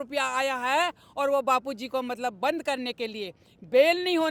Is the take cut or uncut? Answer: uncut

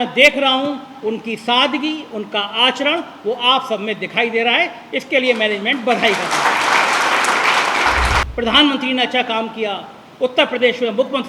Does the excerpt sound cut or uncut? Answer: cut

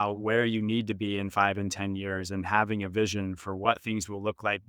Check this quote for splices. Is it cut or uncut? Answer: cut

